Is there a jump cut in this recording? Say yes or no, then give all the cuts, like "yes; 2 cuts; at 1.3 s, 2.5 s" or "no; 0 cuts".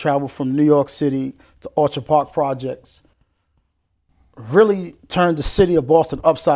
no; 0 cuts